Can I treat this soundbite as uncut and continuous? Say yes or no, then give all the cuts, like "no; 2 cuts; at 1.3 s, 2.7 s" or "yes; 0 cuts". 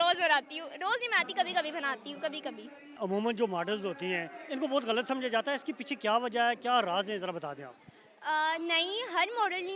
no; 1 cut; at 3.0 s